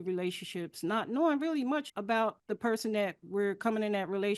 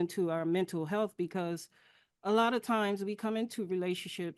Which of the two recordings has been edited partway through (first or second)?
first